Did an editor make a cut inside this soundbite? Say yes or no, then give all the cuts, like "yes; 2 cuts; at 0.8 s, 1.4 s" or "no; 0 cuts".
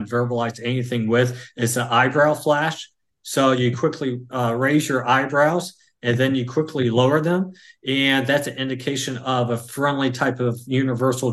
no; 0 cuts